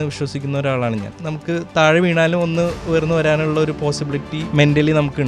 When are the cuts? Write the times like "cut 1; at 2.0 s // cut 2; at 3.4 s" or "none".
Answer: cut 1; at 1.1 s // cut 2; at 2.8 s // cut 3; at 4.4 s